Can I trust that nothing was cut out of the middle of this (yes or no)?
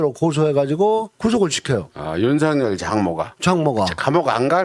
yes